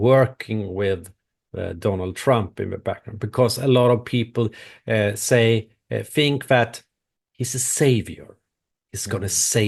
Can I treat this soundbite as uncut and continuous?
yes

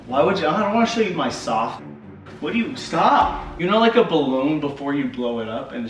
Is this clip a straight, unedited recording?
no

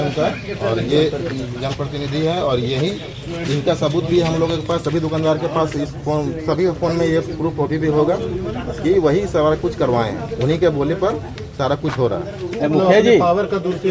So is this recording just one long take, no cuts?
yes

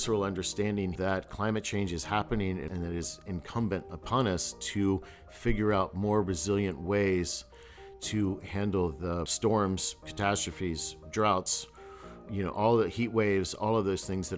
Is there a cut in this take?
yes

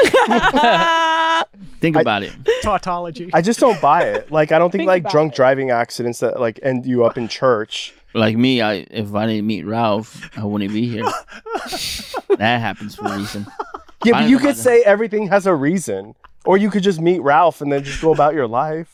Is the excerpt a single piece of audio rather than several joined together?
yes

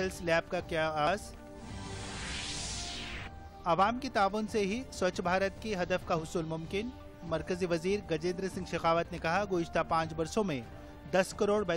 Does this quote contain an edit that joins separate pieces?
yes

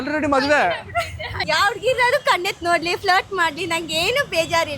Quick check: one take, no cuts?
no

